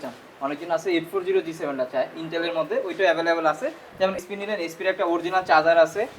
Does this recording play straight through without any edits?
no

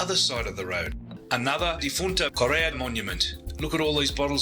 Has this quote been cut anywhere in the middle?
yes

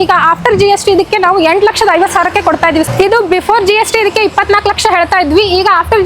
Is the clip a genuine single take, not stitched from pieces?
no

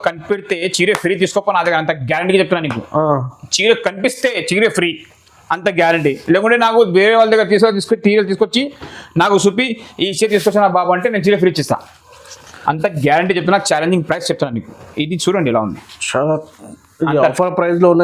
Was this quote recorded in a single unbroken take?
yes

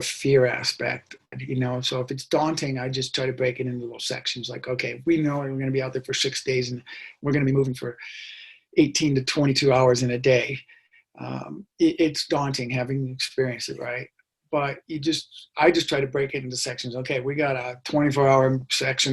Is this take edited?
yes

